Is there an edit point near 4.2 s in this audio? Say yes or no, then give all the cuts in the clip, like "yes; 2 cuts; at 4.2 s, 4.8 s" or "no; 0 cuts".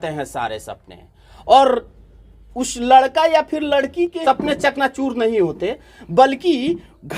yes; 1 cut; at 4.2 s